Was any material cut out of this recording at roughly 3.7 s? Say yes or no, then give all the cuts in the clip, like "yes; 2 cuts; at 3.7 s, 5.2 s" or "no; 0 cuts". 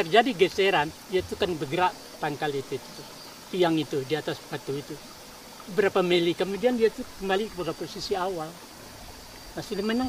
no; 0 cuts